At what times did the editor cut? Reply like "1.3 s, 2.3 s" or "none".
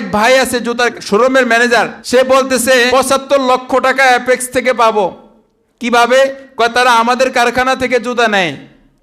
0.9 s, 2.0 s, 2.9 s